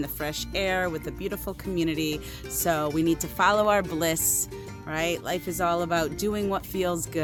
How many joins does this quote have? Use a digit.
0